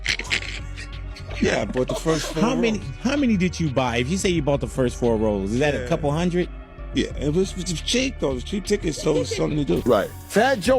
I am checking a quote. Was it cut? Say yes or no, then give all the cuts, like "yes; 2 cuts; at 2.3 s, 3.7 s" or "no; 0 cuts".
yes; 1 cut; at 9.8 s